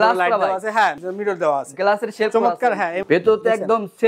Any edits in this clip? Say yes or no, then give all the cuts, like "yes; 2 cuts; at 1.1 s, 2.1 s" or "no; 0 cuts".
yes; 2 cuts; at 1.0 s, 3.0 s